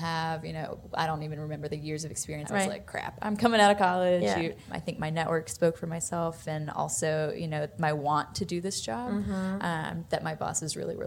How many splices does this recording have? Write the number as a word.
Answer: two